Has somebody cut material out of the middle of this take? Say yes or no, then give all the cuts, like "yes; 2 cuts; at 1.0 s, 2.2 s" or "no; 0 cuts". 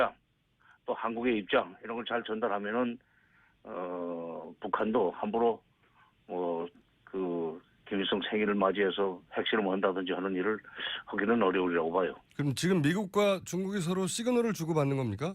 no; 0 cuts